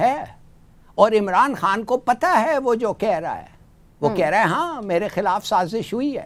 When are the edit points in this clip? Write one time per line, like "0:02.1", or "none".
none